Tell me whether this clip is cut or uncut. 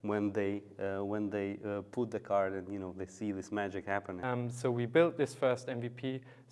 cut